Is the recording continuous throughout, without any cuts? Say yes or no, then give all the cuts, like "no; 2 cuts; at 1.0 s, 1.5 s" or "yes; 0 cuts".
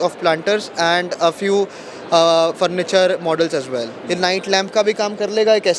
no; 1 cut; at 4.0 s